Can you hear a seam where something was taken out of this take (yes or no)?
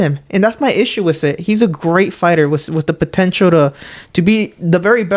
no